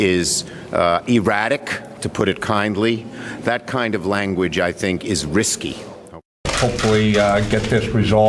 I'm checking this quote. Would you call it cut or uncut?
uncut